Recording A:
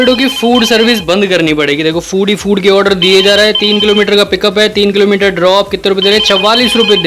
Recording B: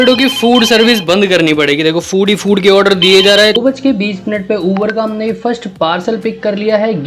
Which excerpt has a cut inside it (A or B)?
B